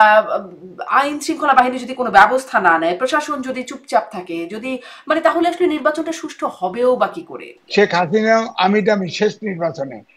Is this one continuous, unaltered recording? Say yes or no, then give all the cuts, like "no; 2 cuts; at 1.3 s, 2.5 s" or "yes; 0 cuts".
no; 1 cut; at 7.5 s